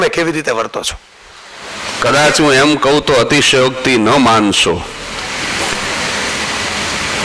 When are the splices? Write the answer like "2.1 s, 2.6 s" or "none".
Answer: 1.8 s